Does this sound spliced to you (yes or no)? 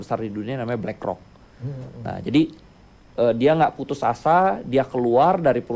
no